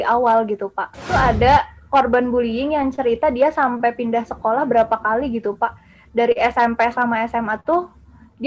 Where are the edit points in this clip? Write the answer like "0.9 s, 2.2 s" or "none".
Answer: 1.0 s